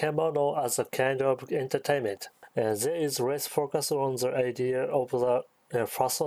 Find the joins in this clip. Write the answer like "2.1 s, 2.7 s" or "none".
none